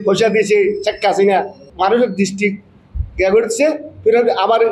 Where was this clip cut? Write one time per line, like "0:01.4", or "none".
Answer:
0:01.6